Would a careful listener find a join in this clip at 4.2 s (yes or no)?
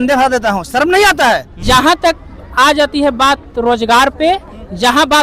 no